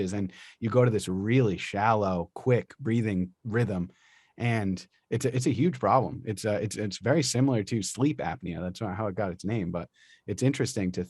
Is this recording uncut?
no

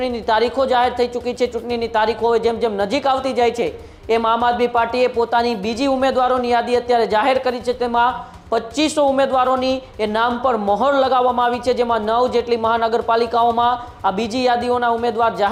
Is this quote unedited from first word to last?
yes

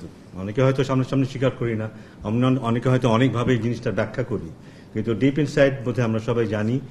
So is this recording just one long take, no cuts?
yes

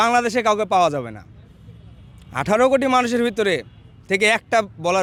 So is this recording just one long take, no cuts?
yes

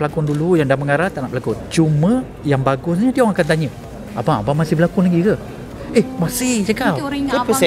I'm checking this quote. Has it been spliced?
no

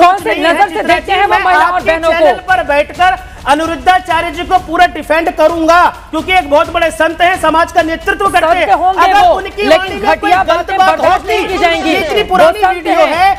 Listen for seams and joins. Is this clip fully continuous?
yes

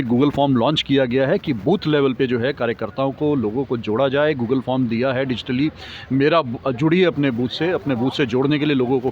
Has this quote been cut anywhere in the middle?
no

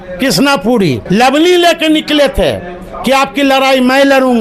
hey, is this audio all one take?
no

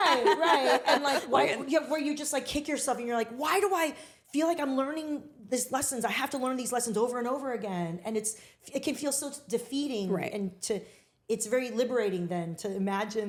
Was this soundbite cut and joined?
no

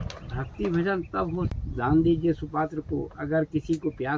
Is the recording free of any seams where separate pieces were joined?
no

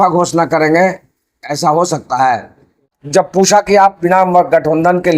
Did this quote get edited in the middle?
yes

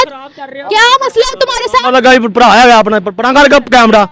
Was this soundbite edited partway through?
no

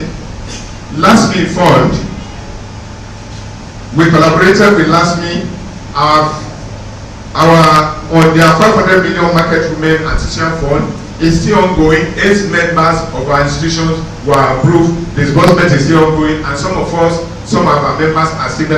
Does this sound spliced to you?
yes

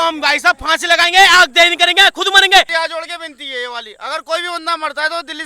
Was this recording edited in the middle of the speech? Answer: yes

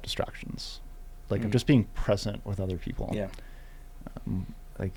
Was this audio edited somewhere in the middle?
no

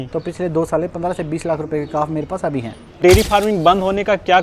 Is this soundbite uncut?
no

